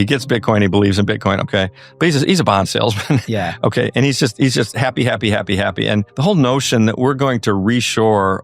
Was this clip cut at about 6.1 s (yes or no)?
yes